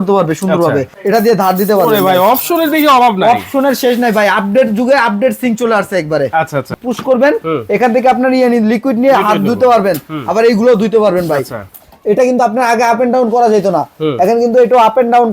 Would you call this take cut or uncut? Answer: cut